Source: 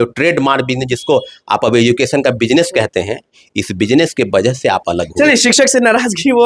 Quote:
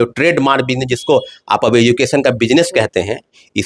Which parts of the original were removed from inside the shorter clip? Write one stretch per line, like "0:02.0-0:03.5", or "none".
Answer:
none